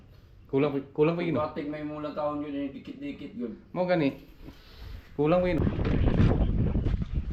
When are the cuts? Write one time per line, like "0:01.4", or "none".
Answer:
0:05.6